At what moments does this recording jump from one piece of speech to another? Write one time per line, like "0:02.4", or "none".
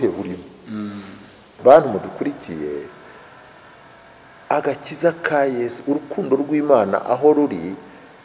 0:01.5